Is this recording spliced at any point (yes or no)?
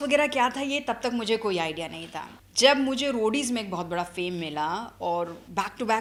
no